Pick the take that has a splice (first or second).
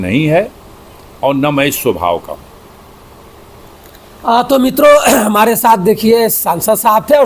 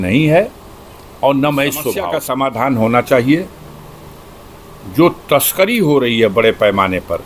second